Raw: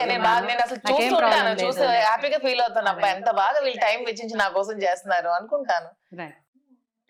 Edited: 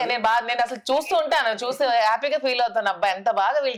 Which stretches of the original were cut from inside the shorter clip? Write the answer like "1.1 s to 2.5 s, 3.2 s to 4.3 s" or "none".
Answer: none